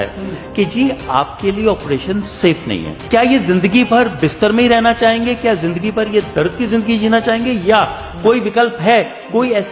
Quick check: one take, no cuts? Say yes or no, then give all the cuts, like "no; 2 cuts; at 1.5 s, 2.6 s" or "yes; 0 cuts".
no; 1 cut; at 2.9 s